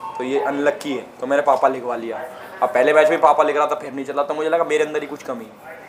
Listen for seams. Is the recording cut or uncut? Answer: uncut